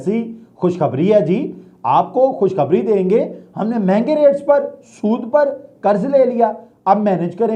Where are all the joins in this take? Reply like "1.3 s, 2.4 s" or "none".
none